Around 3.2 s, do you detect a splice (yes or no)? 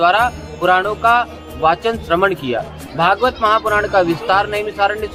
no